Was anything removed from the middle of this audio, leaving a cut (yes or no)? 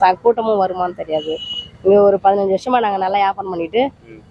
no